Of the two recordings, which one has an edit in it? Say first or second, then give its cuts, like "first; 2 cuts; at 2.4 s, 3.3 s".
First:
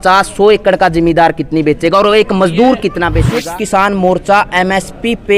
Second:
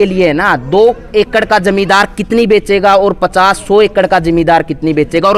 first; 1 cut; at 3.3 s